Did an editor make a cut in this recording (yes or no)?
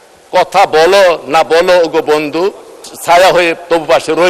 yes